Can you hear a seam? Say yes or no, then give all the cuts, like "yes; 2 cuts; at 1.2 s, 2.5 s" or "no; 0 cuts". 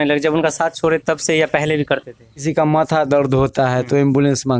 yes; 1 cut; at 2.5 s